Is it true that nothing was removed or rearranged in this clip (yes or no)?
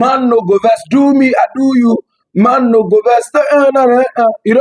yes